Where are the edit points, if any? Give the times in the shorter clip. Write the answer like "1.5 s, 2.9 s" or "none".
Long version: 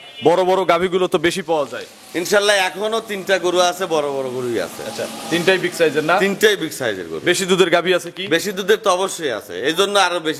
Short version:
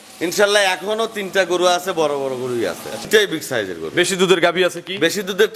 3.1 s